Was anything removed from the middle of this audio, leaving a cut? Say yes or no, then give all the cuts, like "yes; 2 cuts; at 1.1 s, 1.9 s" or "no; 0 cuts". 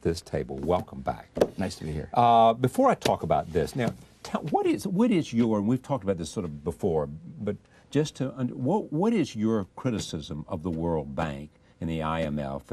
no; 0 cuts